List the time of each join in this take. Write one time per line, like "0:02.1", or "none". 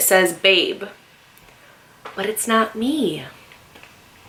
none